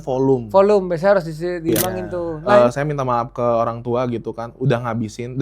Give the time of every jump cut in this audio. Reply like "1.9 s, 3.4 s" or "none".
2.4 s